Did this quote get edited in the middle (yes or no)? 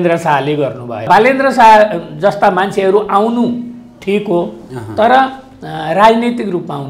yes